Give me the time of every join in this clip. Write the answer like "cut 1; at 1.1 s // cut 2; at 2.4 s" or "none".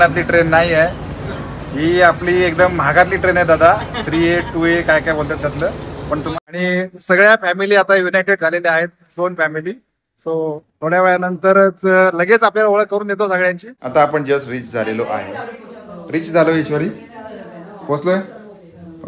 cut 1; at 6.3 s // cut 2; at 13.7 s